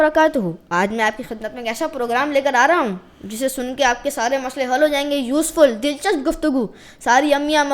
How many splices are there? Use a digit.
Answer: 0